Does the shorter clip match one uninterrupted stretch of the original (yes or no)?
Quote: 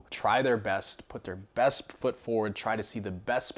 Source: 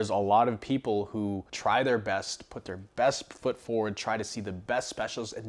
yes